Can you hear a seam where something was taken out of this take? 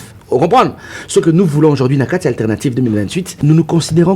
yes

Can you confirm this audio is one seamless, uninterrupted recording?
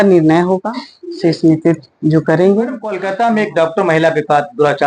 no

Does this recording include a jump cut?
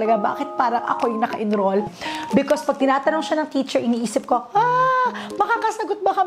yes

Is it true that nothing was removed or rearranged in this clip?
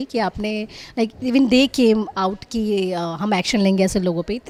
yes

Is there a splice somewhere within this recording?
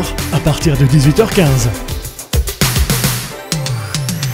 yes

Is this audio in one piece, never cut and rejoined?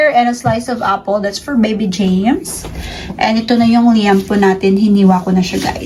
yes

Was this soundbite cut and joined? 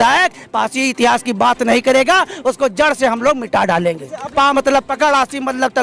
yes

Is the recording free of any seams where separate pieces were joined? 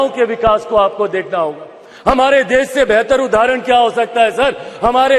yes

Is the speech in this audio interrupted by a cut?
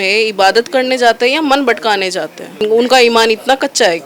yes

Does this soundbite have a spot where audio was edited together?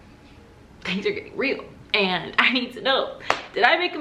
no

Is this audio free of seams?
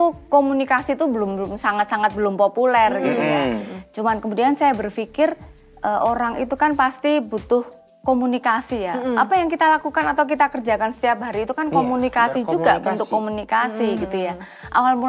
yes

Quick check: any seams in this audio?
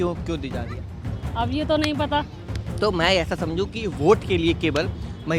no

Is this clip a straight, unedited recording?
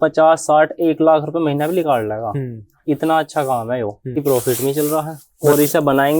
no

